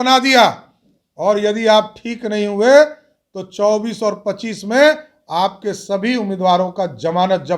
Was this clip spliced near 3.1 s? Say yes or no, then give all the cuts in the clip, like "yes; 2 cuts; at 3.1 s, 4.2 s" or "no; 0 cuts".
no; 0 cuts